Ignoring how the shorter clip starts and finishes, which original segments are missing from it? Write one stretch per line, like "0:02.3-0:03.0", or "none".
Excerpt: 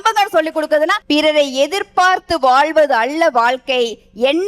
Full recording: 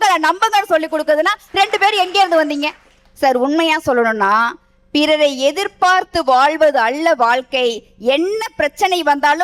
0:01.4-0:04.8